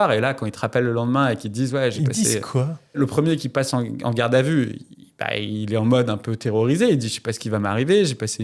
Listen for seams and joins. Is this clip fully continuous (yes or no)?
yes